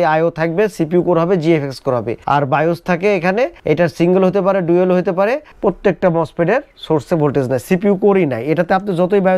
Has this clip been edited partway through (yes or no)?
yes